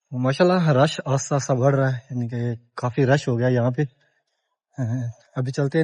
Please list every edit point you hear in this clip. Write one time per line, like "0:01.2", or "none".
none